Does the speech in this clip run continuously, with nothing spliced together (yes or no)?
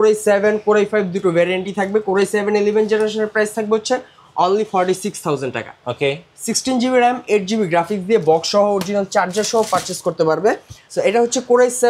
no